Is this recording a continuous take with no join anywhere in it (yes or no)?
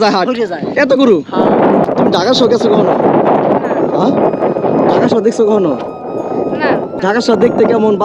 no